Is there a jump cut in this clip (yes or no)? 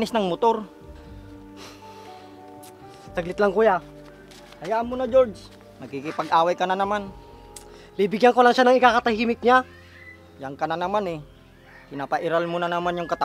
no